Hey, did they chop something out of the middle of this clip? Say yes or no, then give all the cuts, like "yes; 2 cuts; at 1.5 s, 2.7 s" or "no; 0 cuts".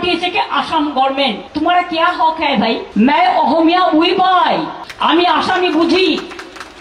yes; 3 cuts; at 1.4 s, 2.9 s, 4.8 s